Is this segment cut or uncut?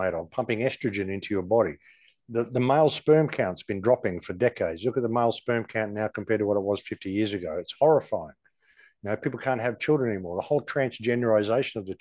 uncut